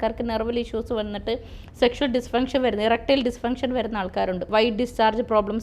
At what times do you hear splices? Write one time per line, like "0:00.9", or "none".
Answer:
0:04.5